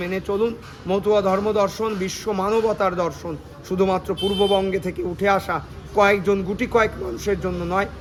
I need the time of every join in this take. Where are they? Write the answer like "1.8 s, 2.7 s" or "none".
none